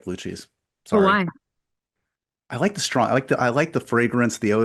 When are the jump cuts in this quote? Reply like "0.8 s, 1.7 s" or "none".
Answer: none